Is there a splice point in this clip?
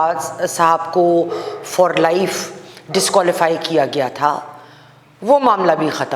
no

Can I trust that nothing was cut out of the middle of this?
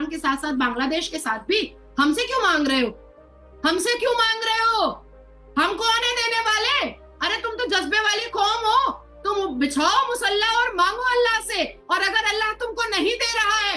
yes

